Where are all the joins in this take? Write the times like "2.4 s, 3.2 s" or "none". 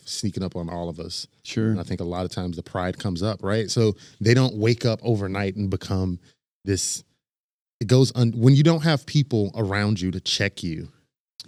none